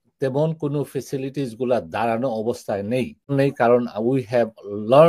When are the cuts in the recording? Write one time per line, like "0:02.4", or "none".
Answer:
0:03.3

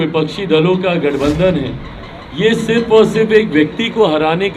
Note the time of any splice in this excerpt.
none

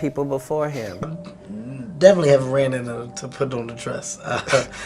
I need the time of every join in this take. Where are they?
0:01.1

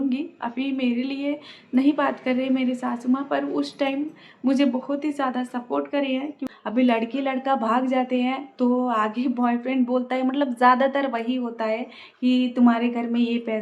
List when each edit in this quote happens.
0:06.5

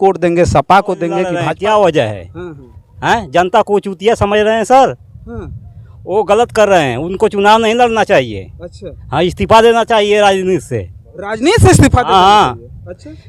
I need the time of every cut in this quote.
0:01.4

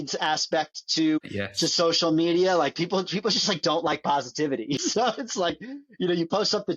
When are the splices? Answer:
0:01.2
0:04.8

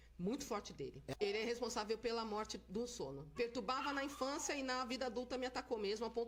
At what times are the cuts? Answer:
none

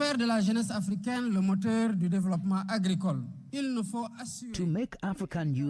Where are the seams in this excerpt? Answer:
none

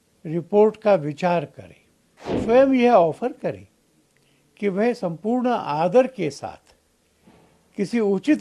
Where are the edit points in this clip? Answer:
0:02.4

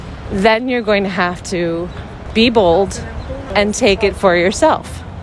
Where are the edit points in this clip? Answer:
none

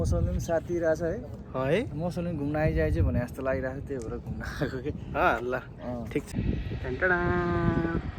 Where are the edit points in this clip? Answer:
0:06.3

